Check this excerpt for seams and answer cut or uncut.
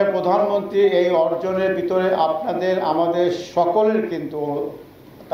uncut